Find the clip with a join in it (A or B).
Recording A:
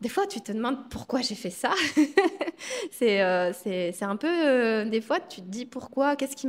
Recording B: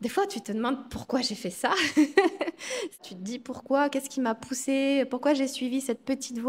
B